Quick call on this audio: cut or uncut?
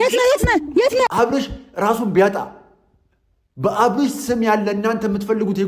cut